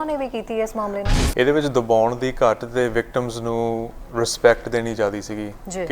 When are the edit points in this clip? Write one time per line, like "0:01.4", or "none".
0:01.1